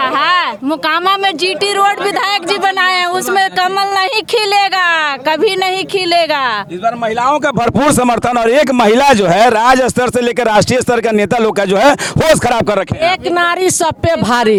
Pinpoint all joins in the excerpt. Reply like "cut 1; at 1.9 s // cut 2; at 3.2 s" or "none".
none